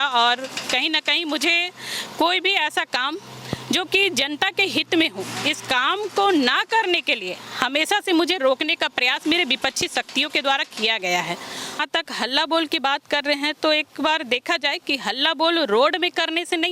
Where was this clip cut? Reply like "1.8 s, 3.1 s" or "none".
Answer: 11.8 s